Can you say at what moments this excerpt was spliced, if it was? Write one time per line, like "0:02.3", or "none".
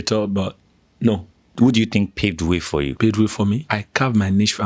0:01.5
0:02.9
0:03.7